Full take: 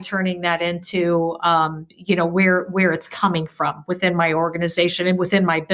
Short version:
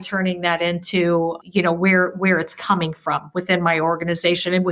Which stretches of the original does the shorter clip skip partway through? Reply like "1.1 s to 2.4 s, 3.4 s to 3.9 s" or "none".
1.4 s to 1.9 s